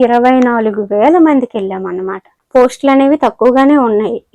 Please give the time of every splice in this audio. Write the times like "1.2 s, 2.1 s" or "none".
2.4 s